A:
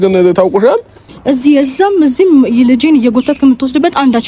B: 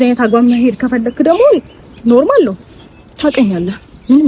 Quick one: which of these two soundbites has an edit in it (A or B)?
A